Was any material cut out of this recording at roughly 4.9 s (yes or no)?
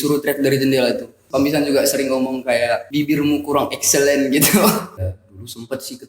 yes